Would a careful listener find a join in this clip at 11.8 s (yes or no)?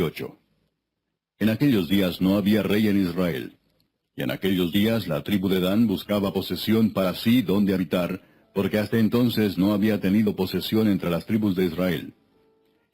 yes